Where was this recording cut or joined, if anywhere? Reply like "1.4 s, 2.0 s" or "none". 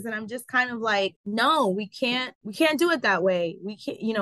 1.2 s, 2.4 s